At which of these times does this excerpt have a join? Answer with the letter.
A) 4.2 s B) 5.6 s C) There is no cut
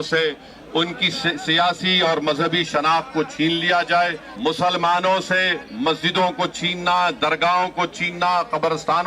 A